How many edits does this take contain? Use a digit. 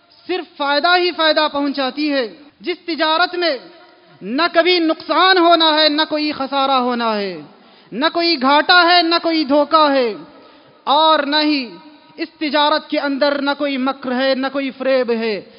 1